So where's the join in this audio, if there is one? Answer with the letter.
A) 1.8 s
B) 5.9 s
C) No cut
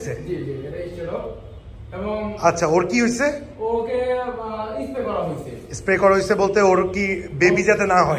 C